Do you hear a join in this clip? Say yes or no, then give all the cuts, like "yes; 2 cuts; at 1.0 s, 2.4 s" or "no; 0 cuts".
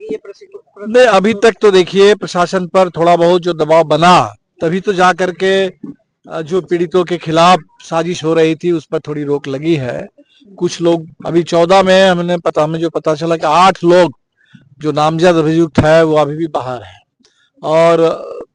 no; 0 cuts